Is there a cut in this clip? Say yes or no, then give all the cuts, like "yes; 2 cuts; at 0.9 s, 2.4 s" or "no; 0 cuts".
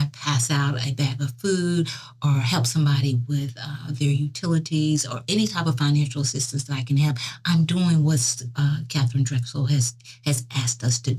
no; 0 cuts